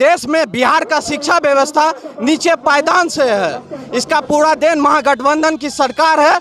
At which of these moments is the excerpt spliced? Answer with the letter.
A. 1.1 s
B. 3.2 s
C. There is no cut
C